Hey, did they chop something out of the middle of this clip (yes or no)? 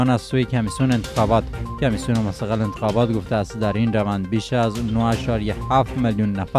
no